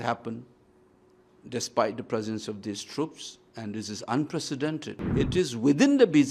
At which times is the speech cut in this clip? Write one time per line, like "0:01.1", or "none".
0:05.0